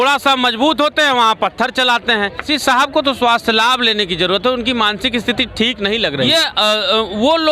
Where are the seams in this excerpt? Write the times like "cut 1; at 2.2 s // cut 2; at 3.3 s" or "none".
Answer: cut 1; at 2.4 s // cut 2; at 6.3 s

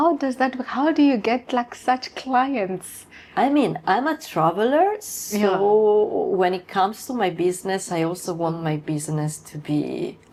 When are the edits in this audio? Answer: none

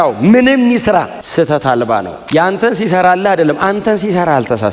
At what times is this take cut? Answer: cut 1; at 1.2 s // cut 2; at 2.2 s

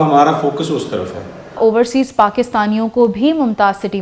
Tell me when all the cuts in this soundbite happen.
cut 1; at 1.6 s

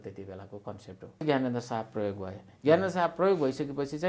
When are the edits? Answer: cut 1; at 1.2 s

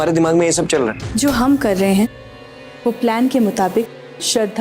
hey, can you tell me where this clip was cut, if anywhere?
cut 1; at 1.0 s

